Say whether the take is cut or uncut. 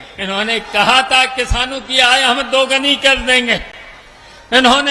uncut